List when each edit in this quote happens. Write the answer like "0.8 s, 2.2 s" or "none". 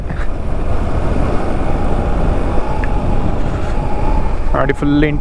none